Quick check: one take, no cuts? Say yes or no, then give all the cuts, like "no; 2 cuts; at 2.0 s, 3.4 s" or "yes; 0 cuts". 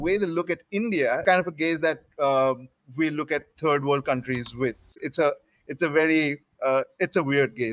no; 2 cuts; at 1.2 s, 4.9 s